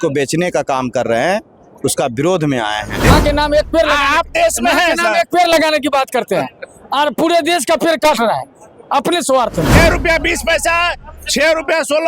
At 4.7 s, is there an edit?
no; 2 cuts; at 3.1 s, 9.7 s

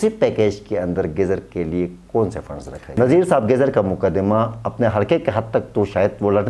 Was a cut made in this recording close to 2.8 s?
yes; 1 cut; at 2.8 s

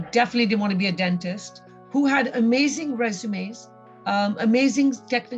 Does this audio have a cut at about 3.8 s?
no; 1 cut; at 1.7 s

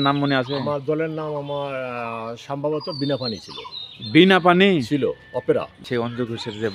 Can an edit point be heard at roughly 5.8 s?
yes; 1 cut; at 5.8 s

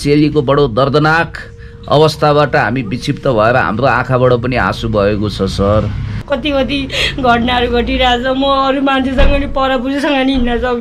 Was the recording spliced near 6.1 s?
yes; 1 cut; at 6.1 s

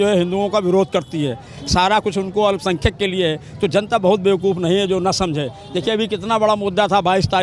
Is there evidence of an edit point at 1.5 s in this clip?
no; 0 cuts

